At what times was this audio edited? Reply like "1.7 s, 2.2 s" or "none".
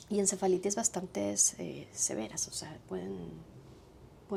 none